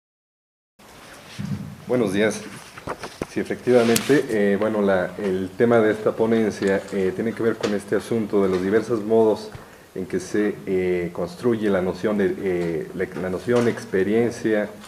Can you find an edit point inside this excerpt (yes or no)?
no